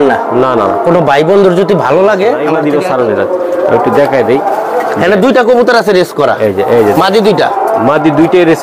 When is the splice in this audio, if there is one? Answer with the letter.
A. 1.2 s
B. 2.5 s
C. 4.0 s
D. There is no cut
B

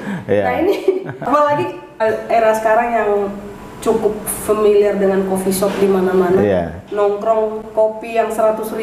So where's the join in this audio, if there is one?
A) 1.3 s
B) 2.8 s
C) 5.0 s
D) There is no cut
A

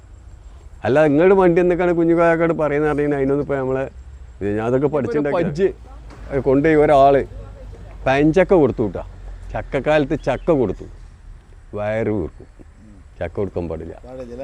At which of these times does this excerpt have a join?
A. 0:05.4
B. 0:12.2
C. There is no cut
A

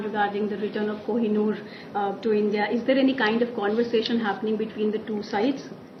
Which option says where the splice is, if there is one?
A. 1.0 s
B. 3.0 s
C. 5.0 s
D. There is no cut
D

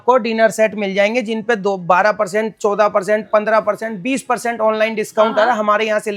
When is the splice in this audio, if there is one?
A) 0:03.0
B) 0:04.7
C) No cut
C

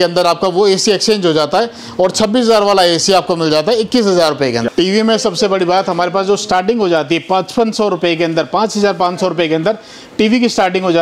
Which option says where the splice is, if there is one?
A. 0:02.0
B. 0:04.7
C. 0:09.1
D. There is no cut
B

